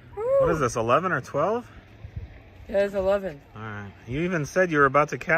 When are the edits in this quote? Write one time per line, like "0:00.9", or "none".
none